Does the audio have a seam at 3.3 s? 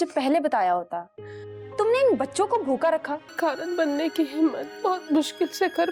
yes; 1 cut; at 3.3 s

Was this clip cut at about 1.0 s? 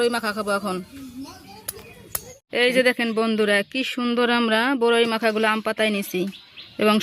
no; 1 cut; at 2.5 s

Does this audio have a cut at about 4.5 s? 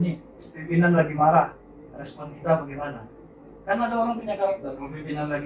no; 0 cuts

